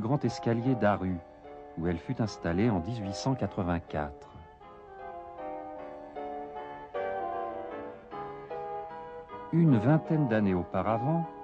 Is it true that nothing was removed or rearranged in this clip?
yes; 0 cuts

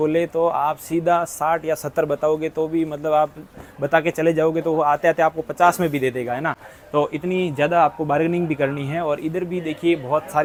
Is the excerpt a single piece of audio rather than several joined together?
yes; 0 cuts

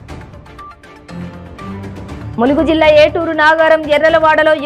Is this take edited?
no; 0 cuts

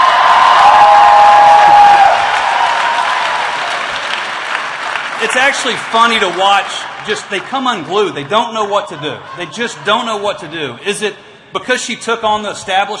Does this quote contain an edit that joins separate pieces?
yes; 1 cut; at 2.0 s

